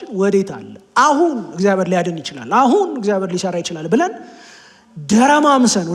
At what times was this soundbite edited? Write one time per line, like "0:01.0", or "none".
none